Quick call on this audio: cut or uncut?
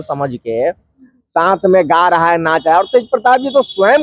uncut